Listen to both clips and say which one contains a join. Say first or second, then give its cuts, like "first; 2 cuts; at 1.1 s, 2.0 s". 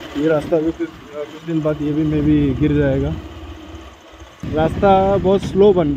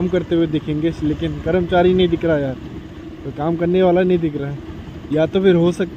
first; 1 cut; at 4.4 s